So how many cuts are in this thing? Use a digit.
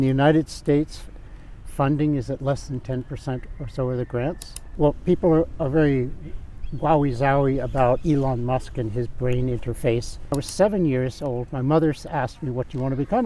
2